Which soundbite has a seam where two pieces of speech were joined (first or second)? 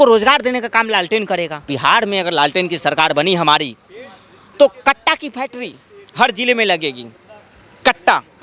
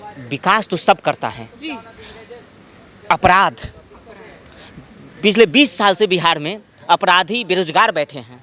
first